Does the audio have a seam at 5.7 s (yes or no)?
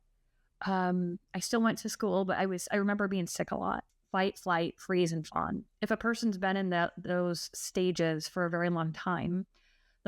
yes